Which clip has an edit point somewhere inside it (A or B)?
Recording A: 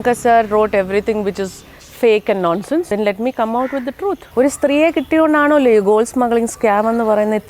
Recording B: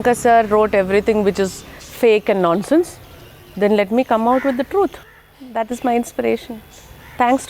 A